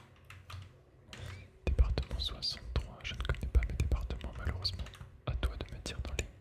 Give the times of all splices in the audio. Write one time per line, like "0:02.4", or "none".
0:01.1
0:05.1